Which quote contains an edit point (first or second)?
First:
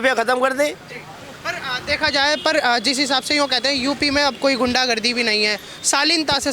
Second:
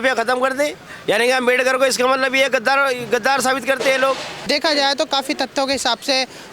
second